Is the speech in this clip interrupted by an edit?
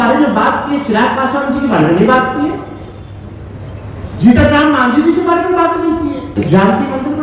yes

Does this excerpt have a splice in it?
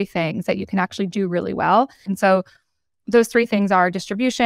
yes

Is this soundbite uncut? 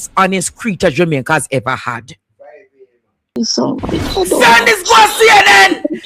no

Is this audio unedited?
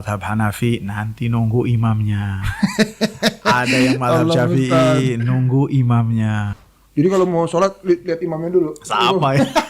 no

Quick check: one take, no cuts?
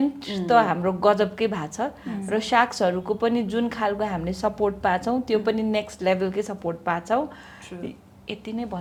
yes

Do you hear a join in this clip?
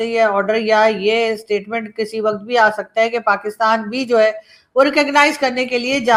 no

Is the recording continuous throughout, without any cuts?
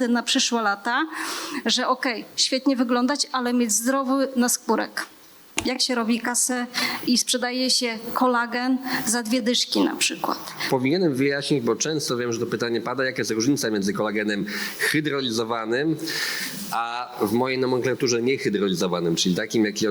no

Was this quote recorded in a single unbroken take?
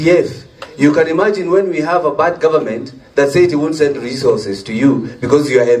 yes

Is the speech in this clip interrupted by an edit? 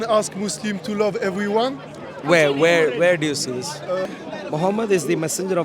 yes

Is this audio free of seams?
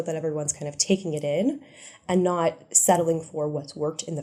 yes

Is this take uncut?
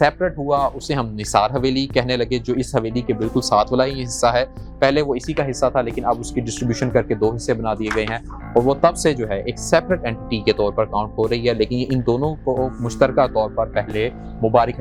yes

